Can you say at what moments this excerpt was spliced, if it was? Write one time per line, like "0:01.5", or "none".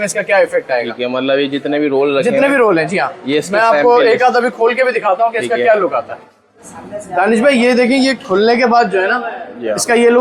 none